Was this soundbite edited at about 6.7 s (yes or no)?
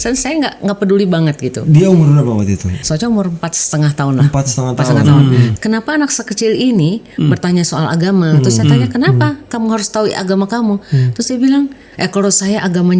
no